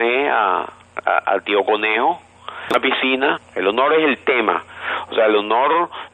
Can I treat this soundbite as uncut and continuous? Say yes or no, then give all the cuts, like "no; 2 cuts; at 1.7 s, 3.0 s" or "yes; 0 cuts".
yes; 0 cuts